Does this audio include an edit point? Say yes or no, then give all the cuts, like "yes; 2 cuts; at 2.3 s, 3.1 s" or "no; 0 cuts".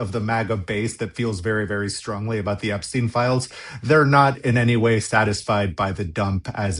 no; 0 cuts